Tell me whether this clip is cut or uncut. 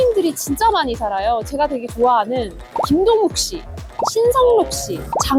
uncut